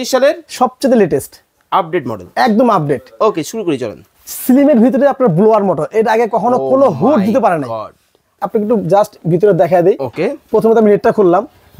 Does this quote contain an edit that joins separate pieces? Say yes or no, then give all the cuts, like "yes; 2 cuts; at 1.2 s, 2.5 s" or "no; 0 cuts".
yes; 1 cut; at 8.3 s